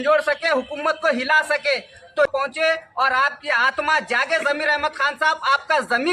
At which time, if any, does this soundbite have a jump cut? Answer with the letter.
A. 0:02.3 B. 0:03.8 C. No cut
A